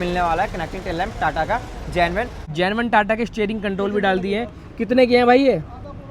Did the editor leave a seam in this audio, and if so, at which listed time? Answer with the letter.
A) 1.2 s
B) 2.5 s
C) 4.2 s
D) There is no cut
B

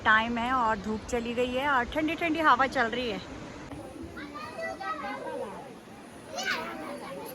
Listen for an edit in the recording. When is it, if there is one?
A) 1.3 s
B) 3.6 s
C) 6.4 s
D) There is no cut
B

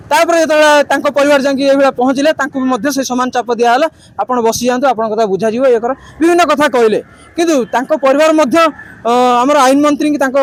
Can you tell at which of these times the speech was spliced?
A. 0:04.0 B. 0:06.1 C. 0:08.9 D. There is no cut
D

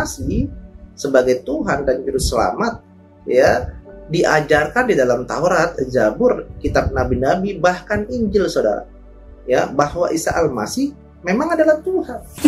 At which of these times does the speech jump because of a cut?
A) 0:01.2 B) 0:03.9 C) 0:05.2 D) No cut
D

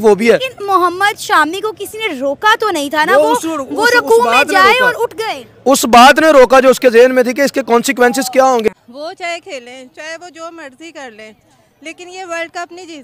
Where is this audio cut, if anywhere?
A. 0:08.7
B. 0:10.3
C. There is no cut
A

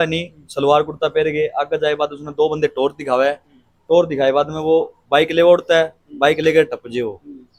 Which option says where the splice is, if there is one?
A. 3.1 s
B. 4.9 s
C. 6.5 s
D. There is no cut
D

